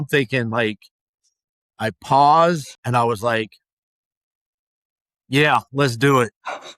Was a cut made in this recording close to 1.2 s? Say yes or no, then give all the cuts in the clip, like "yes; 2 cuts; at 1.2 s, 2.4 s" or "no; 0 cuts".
no; 1 cut; at 2.7 s